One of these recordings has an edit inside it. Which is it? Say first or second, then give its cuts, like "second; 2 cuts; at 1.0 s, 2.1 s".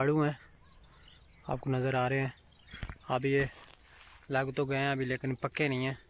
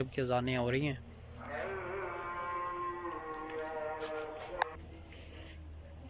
second; 1 cut; at 4.7 s